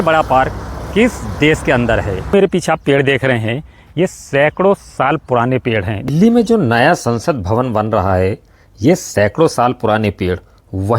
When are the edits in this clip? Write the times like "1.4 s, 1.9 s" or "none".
2.3 s, 6.1 s